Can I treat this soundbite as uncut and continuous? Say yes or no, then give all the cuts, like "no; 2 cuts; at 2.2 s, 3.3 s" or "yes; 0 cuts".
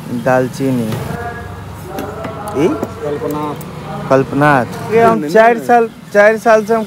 no; 2 cuts; at 1.1 s, 4.9 s